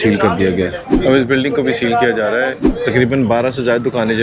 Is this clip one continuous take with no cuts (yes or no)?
no